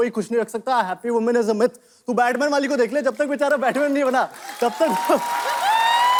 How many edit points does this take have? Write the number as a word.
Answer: zero